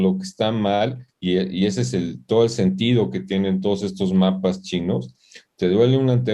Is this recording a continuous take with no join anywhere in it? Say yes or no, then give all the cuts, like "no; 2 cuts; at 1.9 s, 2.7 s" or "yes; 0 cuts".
yes; 0 cuts